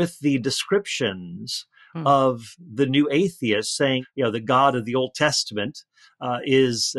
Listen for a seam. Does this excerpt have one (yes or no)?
yes